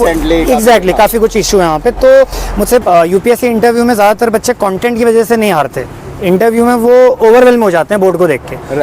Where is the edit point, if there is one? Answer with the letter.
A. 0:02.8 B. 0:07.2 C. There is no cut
A